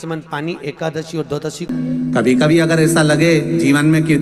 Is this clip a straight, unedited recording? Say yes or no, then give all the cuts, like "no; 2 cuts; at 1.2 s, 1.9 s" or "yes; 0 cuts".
no; 1 cut; at 1.6 s